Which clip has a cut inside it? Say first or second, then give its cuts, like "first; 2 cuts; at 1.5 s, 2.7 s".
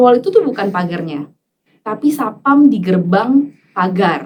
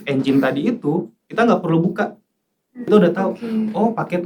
second; 1 cut; at 2.7 s